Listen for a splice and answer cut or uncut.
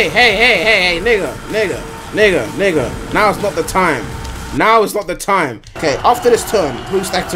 cut